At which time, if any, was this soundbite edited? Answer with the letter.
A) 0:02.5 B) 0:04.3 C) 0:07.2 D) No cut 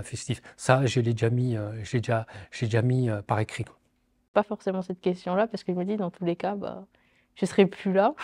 B